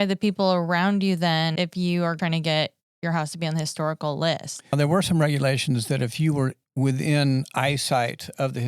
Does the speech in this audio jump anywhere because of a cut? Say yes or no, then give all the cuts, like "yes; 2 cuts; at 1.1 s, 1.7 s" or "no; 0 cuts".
yes; 2 cuts; at 2.1 s, 4.7 s